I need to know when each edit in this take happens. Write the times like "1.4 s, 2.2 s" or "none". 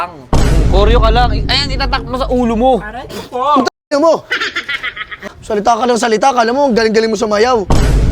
5.3 s

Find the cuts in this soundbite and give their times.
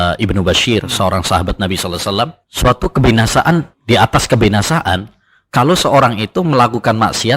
2.4 s, 3.7 s

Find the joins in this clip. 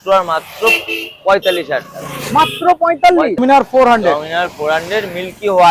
3.4 s

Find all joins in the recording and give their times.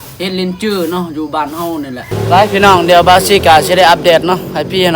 2.1 s

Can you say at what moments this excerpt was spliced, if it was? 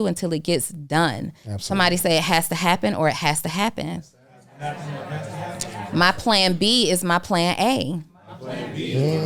none

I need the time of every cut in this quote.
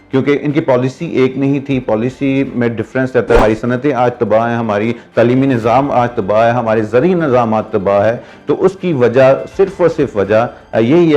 3.4 s

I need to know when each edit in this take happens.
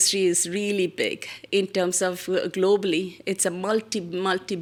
none

